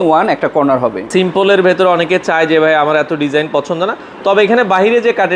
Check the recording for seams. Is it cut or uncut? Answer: cut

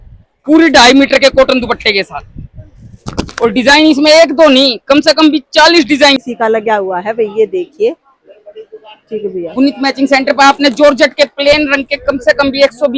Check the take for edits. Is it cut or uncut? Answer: cut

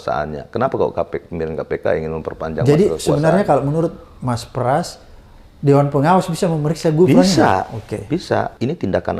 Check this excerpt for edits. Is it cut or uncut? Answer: uncut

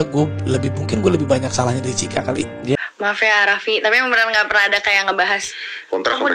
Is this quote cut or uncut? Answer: cut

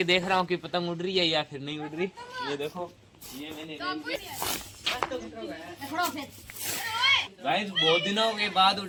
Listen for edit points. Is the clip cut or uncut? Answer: uncut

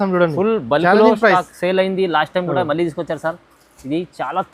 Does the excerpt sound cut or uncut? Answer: uncut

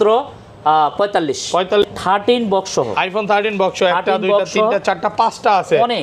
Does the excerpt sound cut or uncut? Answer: cut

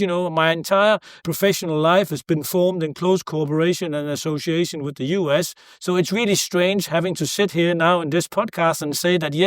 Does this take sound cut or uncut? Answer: cut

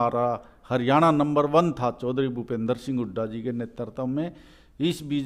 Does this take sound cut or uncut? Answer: uncut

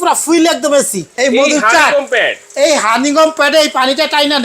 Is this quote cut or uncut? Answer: cut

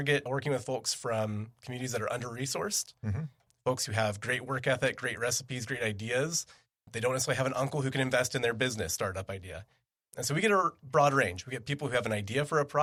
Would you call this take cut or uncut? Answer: uncut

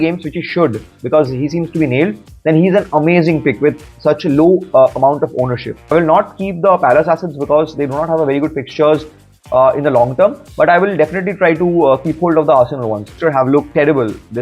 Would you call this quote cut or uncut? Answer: cut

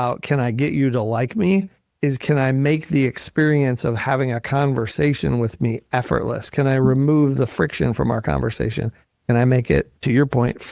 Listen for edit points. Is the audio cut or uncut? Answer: uncut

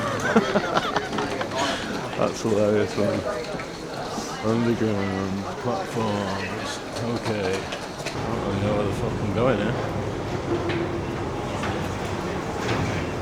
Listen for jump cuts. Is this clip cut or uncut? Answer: uncut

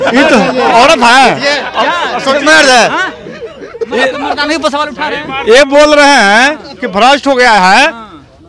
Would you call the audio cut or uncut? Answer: uncut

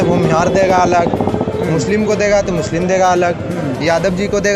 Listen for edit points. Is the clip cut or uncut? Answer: uncut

